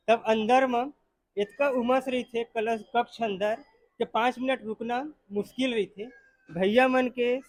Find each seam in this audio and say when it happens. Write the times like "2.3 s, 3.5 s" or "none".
none